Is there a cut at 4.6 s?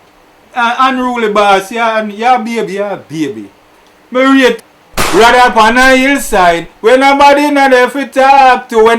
yes; 1 cut; at 4.6 s

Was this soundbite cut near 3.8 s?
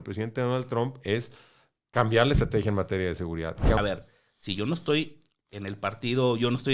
yes; 1 cut; at 3.8 s

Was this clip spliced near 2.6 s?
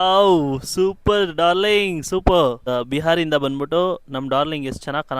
yes; 1 cut; at 2.6 s

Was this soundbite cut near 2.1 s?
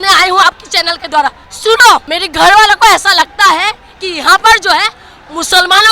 yes; 2 cuts; at 1.5 s, 2.1 s

